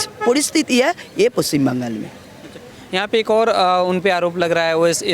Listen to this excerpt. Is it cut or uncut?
uncut